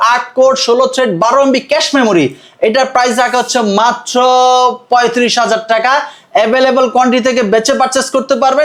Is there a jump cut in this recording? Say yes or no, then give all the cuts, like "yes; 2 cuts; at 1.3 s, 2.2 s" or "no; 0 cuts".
no; 0 cuts